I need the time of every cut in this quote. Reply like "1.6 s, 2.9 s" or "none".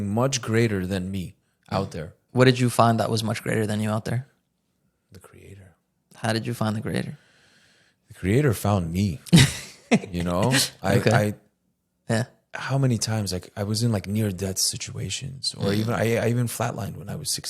2.2 s